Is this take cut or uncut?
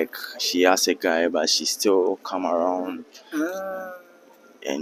uncut